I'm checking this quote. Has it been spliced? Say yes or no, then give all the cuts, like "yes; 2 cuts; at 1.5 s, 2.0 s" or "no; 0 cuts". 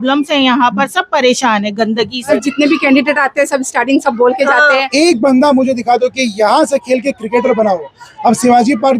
yes; 2 cuts; at 2.4 s, 4.9 s